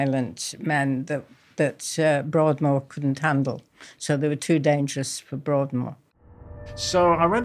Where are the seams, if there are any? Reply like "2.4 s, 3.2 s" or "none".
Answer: 6.2 s